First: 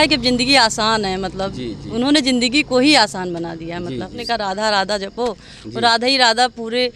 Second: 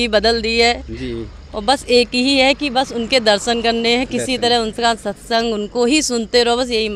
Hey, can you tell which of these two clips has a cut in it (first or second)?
first